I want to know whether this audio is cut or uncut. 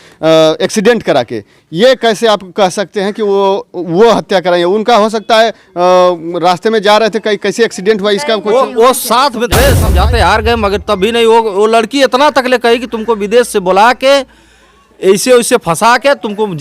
cut